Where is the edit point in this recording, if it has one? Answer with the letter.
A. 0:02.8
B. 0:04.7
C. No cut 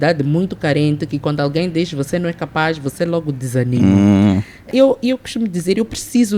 B